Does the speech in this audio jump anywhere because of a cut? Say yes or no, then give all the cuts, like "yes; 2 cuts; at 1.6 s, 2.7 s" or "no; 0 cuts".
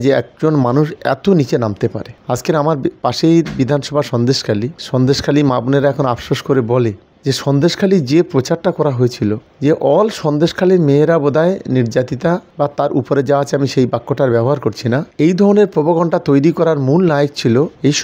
no; 0 cuts